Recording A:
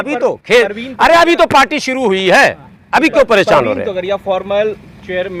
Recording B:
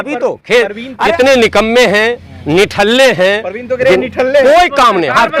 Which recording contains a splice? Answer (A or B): B